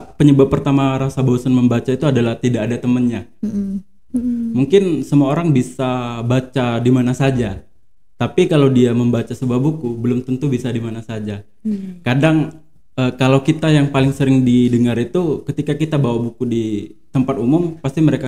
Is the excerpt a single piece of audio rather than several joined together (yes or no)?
no